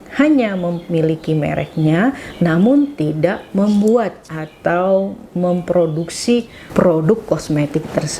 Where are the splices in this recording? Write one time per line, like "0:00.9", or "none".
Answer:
0:06.6